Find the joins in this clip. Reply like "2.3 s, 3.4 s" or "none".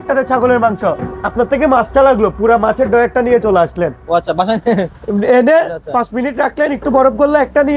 none